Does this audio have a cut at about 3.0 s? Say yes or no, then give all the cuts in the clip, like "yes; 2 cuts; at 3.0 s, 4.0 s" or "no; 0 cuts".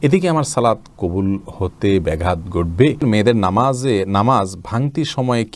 yes; 1 cut; at 3.0 s